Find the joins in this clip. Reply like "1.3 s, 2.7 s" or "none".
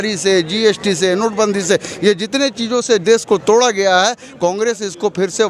none